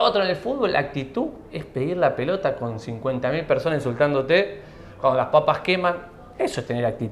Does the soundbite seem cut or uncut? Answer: uncut